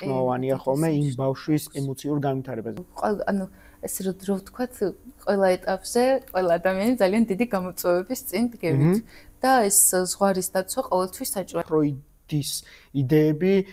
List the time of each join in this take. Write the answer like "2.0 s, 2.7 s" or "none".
2.8 s, 11.6 s

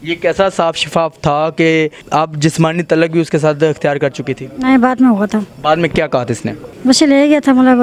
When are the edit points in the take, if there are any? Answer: 2.0 s, 5.5 s, 6.7 s

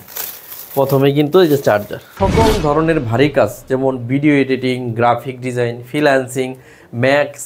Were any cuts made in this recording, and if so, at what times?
2.1 s

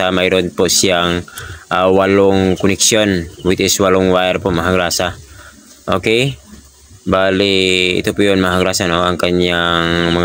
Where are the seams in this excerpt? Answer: none

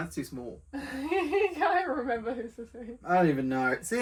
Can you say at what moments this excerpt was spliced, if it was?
none

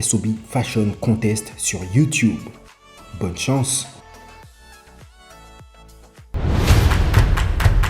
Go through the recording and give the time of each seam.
6.1 s

